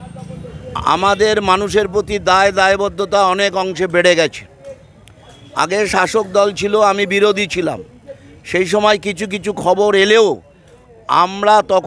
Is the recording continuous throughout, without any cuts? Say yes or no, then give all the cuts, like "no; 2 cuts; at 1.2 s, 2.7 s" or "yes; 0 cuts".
yes; 0 cuts